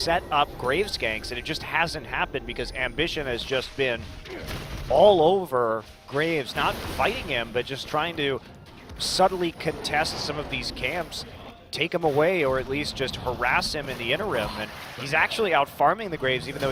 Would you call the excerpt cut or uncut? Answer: uncut